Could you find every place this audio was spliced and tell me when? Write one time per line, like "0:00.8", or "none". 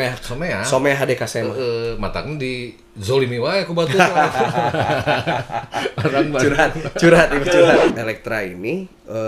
0:07.9